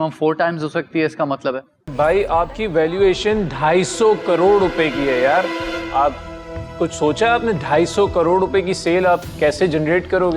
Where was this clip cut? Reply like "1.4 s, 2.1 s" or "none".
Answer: 1.9 s